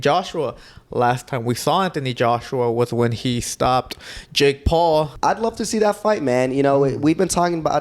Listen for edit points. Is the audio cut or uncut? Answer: cut